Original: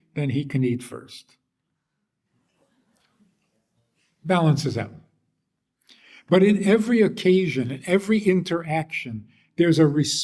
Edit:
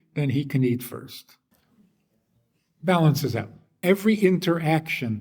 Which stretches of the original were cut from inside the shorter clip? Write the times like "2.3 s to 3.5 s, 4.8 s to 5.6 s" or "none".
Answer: 1.5 s to 2.9 s, 5.1 s to 7.8 s